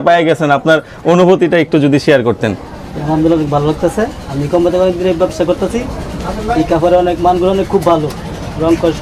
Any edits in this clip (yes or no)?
no